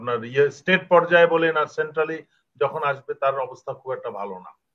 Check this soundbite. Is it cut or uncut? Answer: uncut